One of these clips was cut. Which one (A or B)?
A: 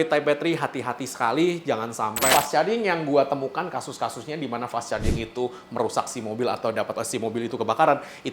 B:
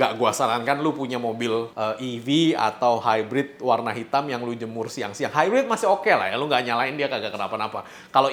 A